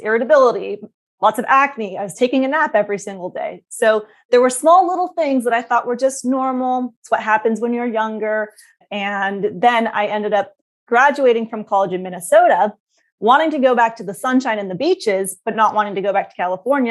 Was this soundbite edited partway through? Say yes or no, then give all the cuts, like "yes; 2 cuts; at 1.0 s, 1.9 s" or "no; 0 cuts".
no; 0 cuts